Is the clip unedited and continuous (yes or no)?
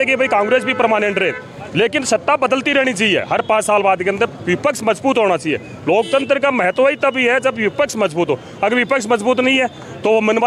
yes